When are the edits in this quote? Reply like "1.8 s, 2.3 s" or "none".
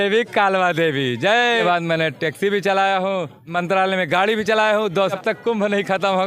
1.5 s, 3.5 s, 5.1 s